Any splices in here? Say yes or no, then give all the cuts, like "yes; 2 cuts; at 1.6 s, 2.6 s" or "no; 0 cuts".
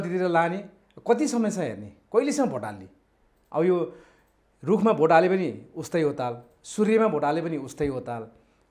no; 0 cuts